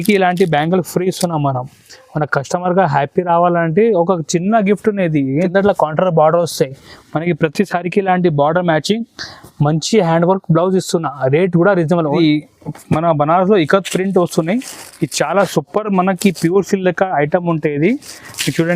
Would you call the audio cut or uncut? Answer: cut